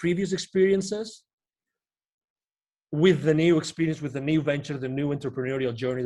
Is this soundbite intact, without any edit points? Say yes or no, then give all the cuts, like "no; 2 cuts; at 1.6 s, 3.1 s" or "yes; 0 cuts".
yes; 0 cuts